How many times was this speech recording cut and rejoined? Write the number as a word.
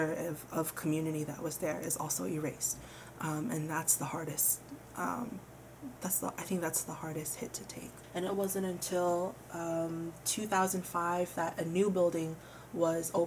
one